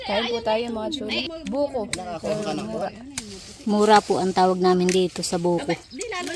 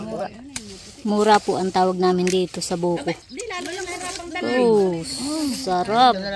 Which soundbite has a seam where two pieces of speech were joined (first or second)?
first